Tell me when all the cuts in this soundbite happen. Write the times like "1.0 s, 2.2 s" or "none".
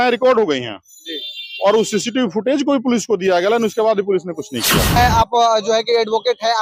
5.0 s